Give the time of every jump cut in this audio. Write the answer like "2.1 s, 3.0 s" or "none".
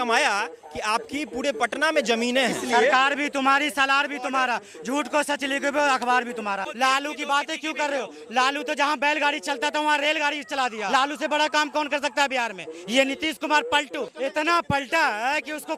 2.6 s, 6.7 s, 10.9 s, 14.1 s